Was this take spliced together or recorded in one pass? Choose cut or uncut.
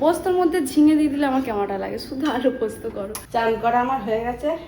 cut